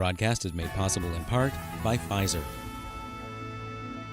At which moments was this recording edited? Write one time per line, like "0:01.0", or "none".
0:02.4